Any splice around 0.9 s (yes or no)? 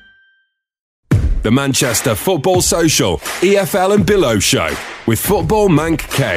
yes